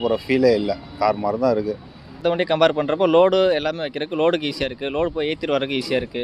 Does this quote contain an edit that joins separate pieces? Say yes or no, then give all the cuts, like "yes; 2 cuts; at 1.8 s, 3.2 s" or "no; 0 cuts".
yes; 1 cut; at 2.2 s